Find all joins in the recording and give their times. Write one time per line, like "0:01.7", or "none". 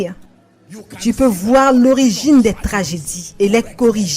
0:03.3